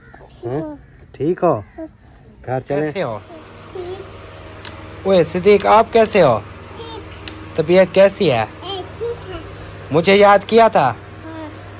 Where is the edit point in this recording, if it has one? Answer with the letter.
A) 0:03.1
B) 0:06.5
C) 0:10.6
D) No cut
A